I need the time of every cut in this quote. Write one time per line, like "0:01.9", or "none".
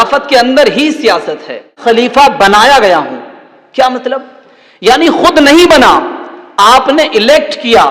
0:01.8